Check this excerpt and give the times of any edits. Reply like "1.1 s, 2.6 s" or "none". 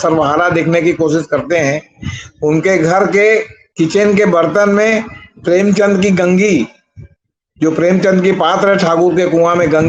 none